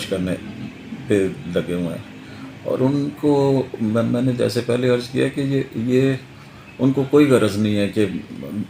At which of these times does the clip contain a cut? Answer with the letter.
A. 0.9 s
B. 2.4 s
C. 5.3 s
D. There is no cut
D